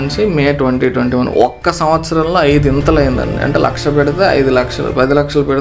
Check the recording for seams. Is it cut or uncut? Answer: uncut